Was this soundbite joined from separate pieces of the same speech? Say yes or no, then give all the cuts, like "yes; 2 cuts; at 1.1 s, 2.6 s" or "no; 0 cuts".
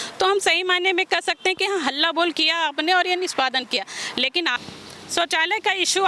yes; 1 cut; at 4.5 s